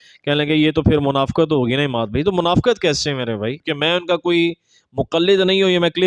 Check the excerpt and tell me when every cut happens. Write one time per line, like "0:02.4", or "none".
0:03.6